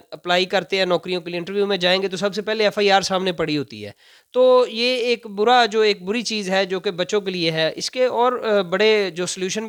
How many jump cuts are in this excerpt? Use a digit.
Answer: 0